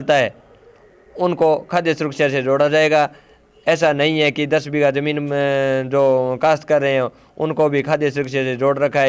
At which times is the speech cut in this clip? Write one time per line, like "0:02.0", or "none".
none